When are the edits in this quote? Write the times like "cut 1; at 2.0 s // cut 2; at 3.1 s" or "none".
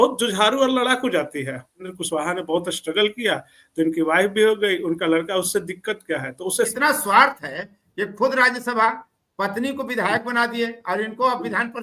cut 1; at 2.0 s // cut 2; at 6.7 s